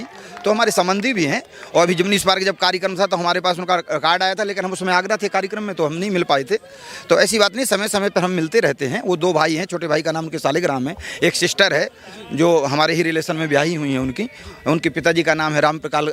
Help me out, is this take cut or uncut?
uncut